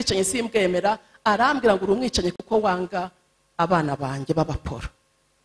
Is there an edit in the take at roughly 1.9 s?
no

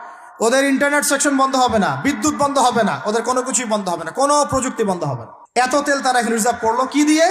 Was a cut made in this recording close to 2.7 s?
no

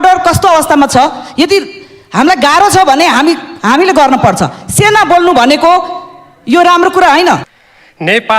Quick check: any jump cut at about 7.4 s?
yes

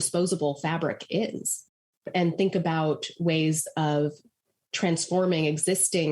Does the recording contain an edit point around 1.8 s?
yes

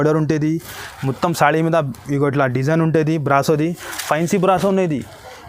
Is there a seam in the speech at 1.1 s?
no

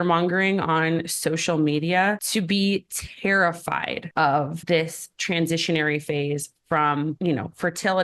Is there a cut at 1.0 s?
no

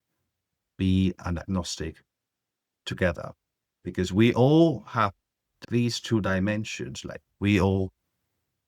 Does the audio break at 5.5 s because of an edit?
yes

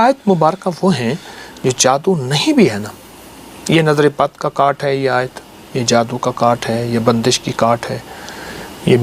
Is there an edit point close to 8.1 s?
no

